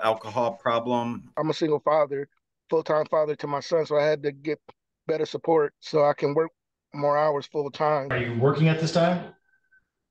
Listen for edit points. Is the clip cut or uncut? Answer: cut